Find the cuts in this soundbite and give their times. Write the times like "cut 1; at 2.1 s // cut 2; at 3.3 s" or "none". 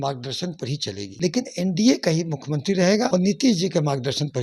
cut 1; at 1.1 s // cut 2; at 3.1 s